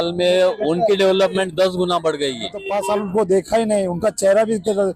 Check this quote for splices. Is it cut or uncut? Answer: cut